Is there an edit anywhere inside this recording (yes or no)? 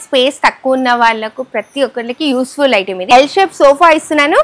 yes